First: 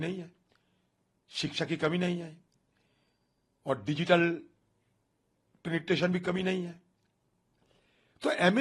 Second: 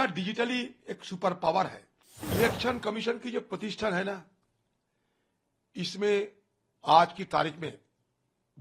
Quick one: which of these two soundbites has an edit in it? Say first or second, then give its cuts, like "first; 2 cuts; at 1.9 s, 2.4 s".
second; 1 cut; at 2.3 s